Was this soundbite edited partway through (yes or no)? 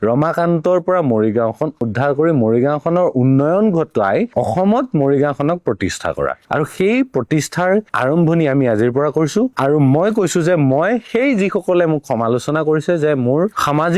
yes